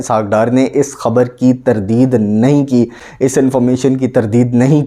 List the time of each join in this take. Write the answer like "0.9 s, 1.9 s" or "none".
none